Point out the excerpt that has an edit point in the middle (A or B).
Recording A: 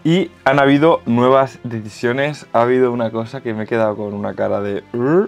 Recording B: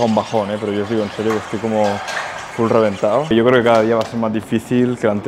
B